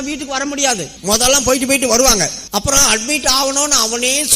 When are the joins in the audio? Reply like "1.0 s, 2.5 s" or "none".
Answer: 0.9 s, 2.4 s